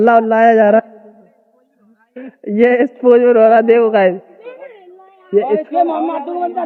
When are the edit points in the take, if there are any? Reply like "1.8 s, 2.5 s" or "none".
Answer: none